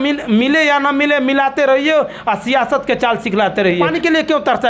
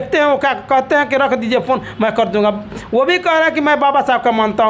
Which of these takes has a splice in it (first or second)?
first